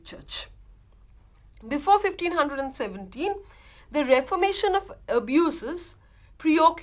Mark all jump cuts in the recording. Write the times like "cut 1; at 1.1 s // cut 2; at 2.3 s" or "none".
cut 1; at 4.5 s